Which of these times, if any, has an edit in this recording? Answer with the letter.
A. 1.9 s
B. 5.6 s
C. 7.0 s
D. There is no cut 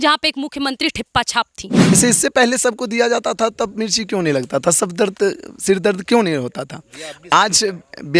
A